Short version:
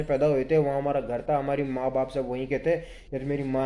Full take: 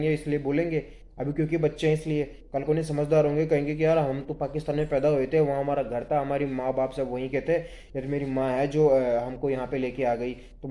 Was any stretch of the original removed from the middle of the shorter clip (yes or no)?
no